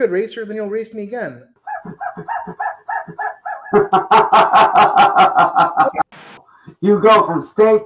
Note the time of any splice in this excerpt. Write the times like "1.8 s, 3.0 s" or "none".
1.5 s, 6.2 s